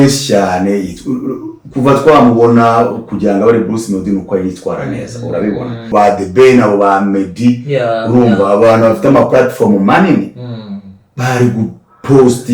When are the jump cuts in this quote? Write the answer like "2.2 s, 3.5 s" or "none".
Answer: 5.9 s